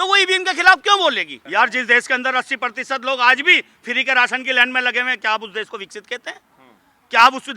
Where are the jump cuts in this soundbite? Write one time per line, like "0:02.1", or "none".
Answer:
0:01.3